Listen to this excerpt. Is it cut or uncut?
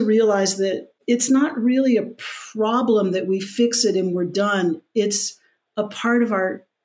cut